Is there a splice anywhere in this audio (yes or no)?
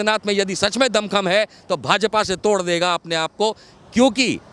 no